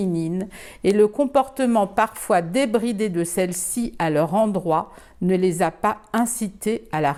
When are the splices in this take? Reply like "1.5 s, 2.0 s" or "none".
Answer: none